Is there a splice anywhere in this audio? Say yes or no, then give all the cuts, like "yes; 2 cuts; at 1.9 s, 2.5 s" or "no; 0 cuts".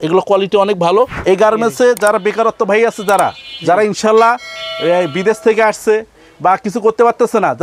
yes; 1 cut; at 1.1 s